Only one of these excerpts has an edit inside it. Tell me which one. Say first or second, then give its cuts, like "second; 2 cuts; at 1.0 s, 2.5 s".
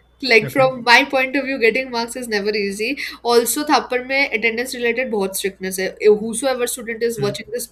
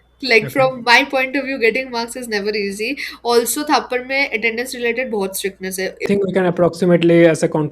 second; 1 cut; at 6.0 s